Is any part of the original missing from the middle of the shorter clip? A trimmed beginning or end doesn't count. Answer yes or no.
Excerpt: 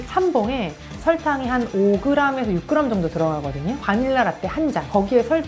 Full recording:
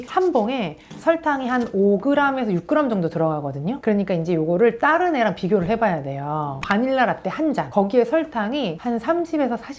yes